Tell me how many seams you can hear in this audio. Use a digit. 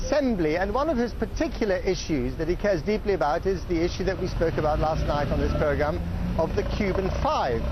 1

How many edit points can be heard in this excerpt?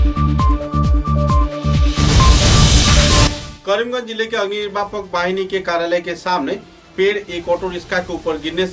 1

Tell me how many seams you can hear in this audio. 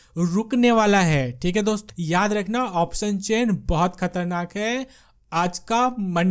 1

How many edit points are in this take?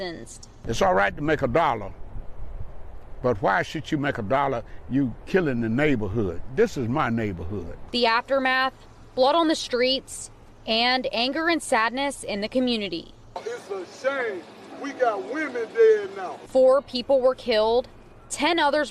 0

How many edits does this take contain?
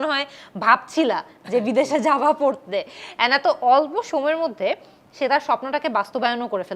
0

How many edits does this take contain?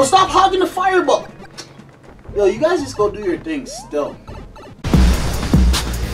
1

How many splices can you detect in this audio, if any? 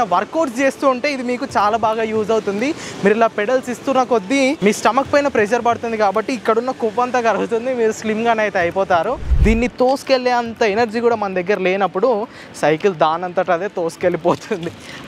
1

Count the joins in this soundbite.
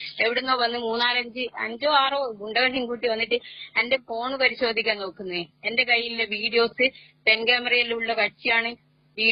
0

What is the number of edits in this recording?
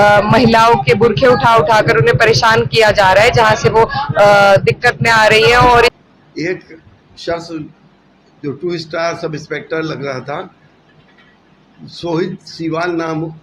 1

